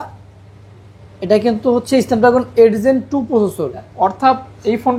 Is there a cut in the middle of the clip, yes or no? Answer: yes